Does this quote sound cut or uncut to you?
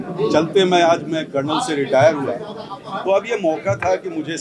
uncut